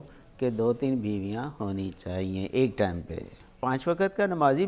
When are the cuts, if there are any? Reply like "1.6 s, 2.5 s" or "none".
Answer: 3.6 s